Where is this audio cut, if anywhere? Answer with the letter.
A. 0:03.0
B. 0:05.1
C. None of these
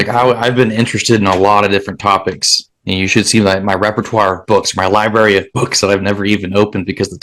C